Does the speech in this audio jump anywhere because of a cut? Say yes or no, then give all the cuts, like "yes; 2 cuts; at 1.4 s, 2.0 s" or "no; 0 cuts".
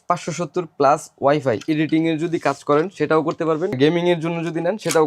yes; 2 cuts; at 1.6 s, 3.8 s